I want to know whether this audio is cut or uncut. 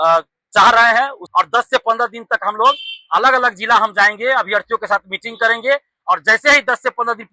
cut